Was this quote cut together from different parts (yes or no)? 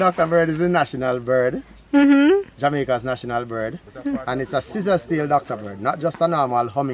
no